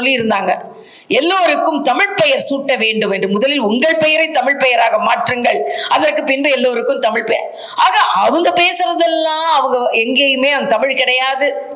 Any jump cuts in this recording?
no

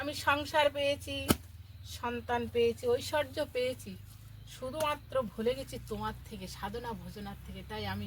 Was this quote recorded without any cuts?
yes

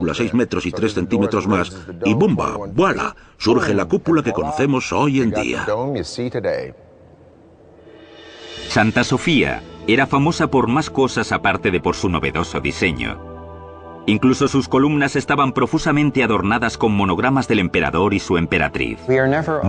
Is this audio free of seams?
yes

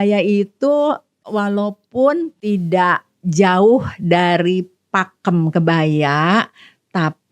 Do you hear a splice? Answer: yes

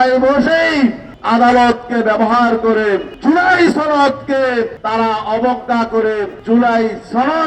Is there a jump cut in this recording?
yes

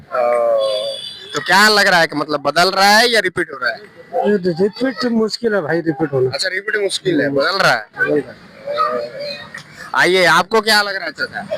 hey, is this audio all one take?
yes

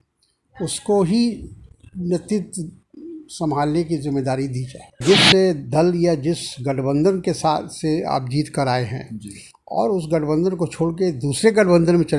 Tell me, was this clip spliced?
yes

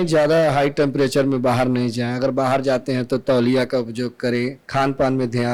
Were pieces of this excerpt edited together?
yes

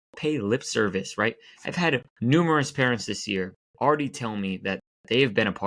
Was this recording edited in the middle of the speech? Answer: yes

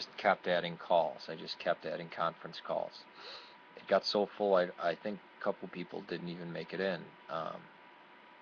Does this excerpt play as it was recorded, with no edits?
no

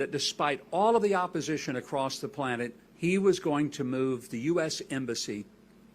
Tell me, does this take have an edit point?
yes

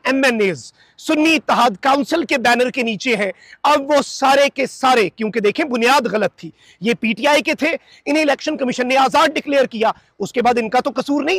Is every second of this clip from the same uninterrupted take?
yes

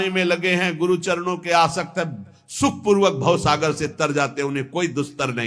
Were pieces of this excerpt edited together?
no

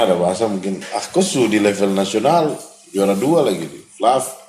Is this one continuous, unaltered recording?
yes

